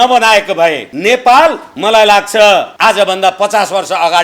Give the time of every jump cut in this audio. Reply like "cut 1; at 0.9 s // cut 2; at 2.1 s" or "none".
cut 1; at 0.9 s // cut 2; at 1.7 s // cut 3; at 2.7 s